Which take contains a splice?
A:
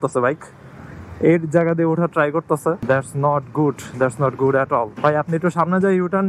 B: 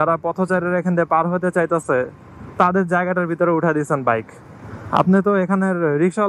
A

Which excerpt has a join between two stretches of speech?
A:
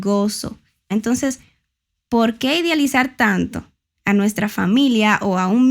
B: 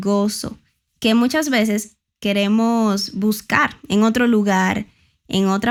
A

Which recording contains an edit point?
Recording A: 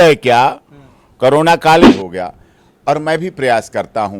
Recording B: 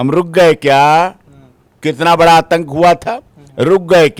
A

